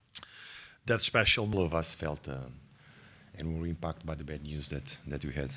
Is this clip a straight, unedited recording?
no; 1 cut; at 1.5 s

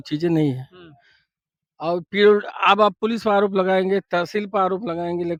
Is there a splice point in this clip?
no; 0 cuts

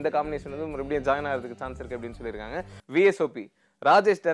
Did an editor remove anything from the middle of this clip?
yes; 1 cut; at 2.8 s

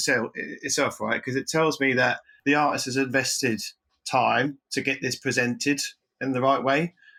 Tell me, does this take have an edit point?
no; 0 cuts

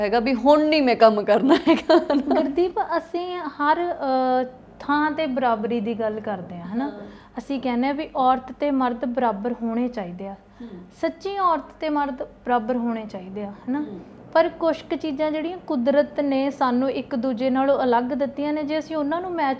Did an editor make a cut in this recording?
no; 0 cuts

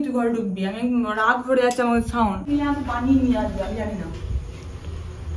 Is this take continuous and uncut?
no; 1 cut; at 2.4 s

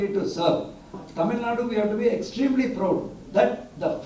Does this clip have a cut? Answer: yes; 2 cuts; at 1.0 s, 3.2 s

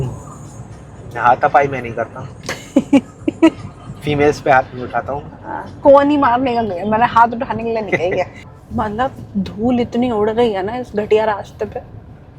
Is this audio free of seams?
no; 1 cut; at 8.4 s

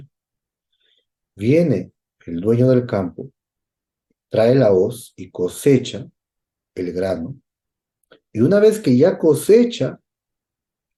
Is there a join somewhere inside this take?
no; 0 cuts

